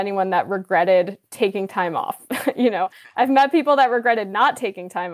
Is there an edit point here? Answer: no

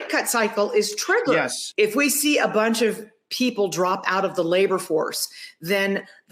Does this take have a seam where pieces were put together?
yes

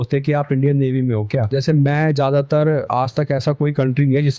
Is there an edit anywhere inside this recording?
yes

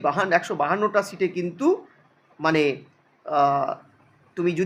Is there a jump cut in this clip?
no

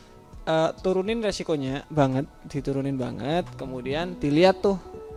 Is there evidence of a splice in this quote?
no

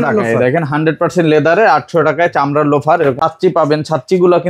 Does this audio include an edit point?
yes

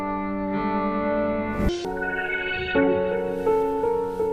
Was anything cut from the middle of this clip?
yes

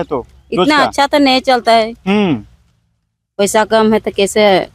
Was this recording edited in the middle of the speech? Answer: no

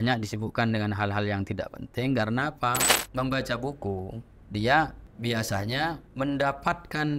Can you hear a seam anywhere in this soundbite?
yes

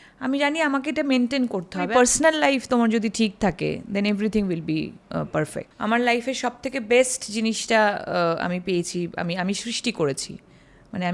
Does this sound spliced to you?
yes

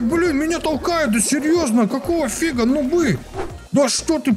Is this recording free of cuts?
no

